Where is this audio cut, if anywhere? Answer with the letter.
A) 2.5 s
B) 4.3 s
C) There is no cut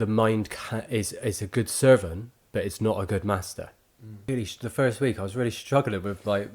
B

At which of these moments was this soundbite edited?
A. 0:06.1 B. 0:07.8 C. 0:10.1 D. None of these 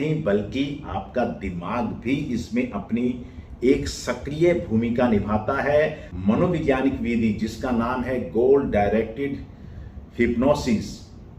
A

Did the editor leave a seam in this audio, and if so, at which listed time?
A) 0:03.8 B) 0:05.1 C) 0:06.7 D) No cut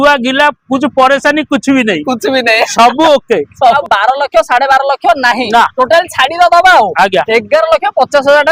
A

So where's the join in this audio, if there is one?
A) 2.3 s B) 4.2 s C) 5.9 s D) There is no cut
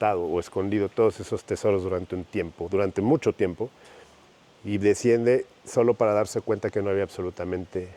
D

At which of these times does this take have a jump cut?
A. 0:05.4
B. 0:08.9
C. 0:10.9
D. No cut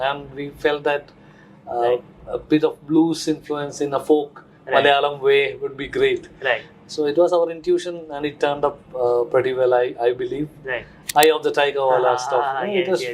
C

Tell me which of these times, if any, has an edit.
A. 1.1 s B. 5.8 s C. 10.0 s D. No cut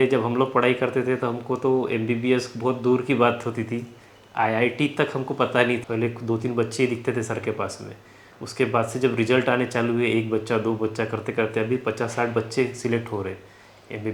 B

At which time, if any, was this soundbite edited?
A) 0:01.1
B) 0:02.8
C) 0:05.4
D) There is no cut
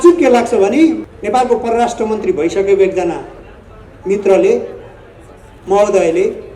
A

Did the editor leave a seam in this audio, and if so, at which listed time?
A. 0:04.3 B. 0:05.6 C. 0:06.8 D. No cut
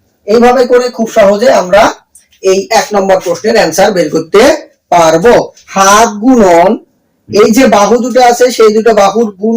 B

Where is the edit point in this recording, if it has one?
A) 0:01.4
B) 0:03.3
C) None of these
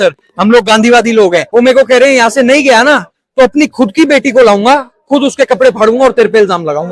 A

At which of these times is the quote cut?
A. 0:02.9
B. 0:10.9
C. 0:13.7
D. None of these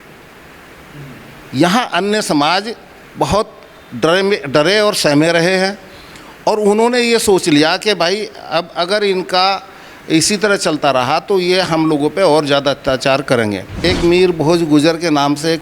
C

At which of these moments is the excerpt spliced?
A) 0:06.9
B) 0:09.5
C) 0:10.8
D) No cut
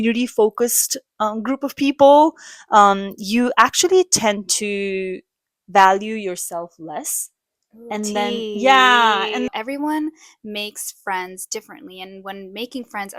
B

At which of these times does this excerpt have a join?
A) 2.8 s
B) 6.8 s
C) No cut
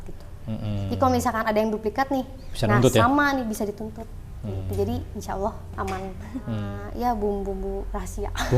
B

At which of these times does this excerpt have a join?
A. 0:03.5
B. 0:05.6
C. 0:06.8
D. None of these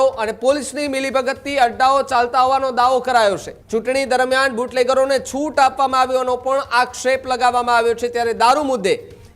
A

